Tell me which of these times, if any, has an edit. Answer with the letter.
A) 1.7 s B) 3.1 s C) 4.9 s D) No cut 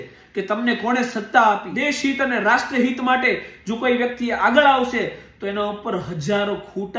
A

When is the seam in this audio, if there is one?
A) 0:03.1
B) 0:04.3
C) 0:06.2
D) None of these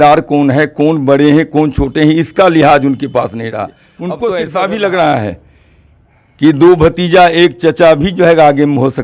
B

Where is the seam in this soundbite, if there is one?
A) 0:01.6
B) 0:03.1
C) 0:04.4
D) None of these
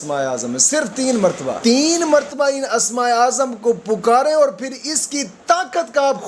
A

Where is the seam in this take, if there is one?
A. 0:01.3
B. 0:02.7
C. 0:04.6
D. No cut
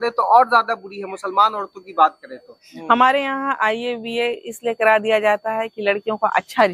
B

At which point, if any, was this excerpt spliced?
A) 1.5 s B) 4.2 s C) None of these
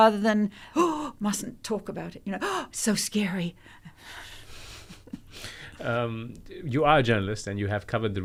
C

